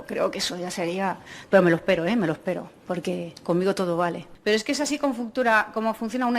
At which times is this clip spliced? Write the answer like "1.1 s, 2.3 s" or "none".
4.3 s